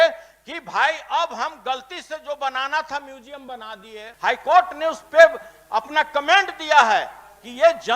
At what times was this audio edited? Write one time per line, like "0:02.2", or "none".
0:04.1